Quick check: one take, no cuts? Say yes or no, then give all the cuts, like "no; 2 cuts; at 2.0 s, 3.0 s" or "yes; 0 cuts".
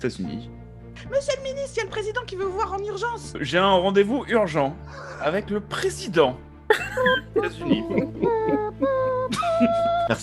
no; 2 cuts; at 1.0 s, 3.4 s